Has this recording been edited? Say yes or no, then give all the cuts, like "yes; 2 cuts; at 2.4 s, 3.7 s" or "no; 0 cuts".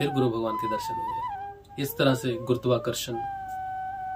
yes; 1 cut; at 1.6 s